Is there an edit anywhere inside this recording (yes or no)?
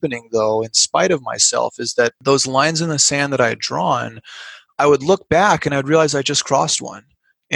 yes